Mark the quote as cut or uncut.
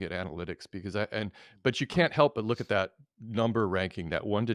uncut